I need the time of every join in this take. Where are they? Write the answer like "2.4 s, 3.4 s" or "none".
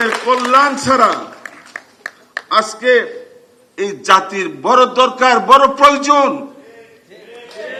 none